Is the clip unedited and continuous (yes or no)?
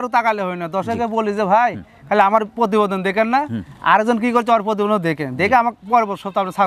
yes